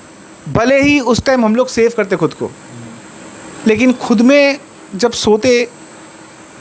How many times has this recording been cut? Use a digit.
0